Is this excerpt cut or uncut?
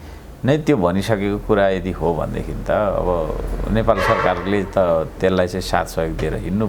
uncut